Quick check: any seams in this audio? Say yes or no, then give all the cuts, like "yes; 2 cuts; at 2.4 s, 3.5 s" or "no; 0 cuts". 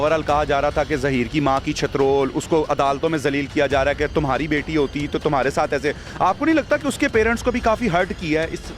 no; 0 cuts